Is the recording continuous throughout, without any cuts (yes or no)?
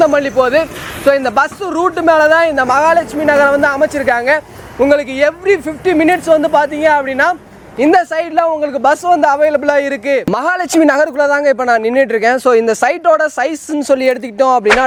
yes